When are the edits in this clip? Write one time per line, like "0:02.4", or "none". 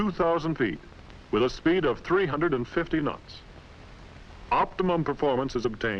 0:01.6

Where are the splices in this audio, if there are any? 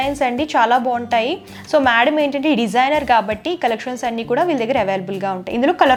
none

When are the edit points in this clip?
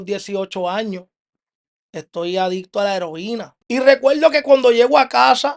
0:03.5

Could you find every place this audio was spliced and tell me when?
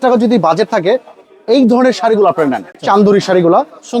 0:02.7

